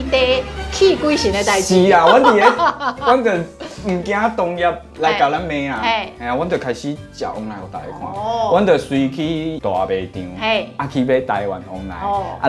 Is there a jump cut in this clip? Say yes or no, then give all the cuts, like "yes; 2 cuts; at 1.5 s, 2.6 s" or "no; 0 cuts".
no; 0 cuts